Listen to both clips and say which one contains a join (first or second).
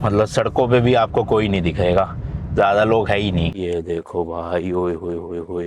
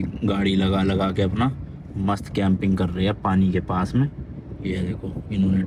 first